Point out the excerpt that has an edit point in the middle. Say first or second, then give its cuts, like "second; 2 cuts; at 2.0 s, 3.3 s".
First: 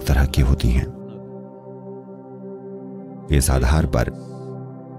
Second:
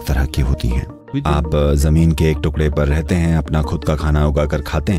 second; 1 cut; at 1.0 s